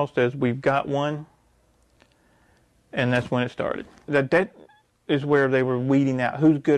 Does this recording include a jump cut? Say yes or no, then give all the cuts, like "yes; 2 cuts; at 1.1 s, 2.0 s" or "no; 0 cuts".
yes; 1 cut; at 4.1 s